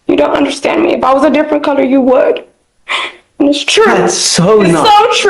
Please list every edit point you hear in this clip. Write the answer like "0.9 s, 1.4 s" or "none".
none